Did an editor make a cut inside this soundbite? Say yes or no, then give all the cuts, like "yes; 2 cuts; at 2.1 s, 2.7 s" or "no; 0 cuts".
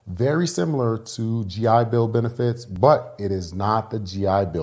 no; 0 cuts